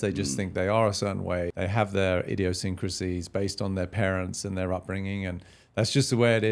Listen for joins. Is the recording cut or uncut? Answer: cut